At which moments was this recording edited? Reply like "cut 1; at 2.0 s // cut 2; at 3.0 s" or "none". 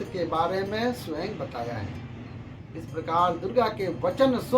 cut 1; at 2.6 s